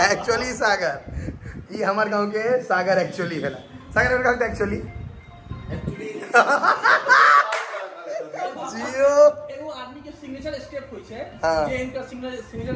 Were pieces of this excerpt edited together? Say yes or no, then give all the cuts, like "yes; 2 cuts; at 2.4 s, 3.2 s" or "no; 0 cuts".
no; 0 cuts